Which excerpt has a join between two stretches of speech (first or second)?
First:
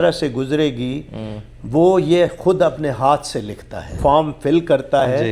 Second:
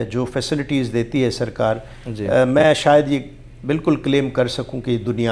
first